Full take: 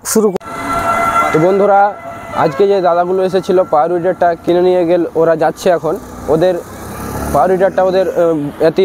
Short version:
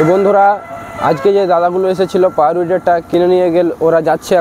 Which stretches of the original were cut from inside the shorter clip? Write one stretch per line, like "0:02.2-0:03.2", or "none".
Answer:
none